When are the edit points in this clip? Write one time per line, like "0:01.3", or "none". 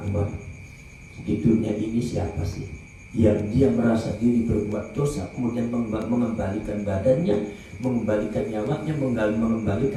none